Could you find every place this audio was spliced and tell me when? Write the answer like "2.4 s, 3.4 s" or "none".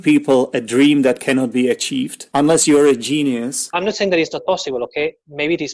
2.2 s, 3.7 s